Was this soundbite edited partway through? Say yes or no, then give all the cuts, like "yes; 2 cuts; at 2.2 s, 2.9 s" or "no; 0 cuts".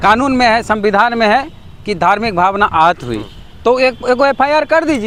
no; 0 cuts